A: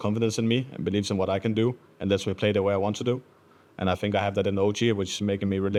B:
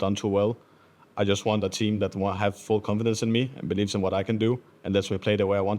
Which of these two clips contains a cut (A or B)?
B